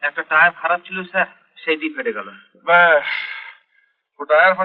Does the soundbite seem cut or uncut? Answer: uncut